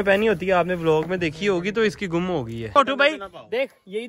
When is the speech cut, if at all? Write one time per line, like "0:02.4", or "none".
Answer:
0:02.7